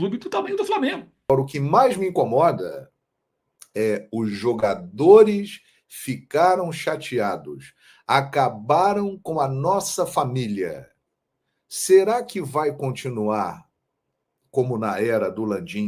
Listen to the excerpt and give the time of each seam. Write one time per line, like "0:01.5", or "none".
0:01.3